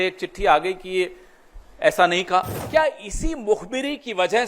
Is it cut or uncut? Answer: cut